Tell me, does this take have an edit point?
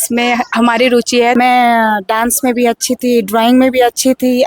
yes; 1 cut; at 1.3 s

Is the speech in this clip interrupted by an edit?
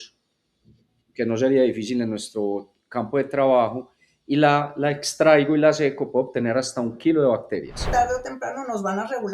yes; 1 cut; at 7.8 s

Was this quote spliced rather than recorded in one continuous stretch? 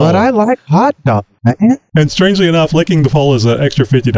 yes; 1 cut; at 1.6 s

